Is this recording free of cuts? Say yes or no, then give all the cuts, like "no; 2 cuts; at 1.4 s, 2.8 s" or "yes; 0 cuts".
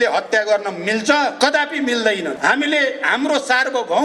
no; 2 cuts; at 1.3 s, 2.3 s